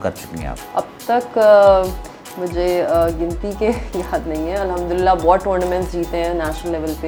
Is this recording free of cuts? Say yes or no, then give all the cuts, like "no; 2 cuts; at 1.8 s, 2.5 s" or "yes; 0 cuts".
yes; 0 cuts